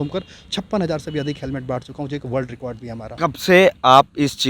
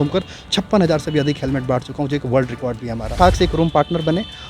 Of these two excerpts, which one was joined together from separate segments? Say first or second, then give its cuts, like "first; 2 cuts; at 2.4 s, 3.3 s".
second; 1 cut; at 3.1 s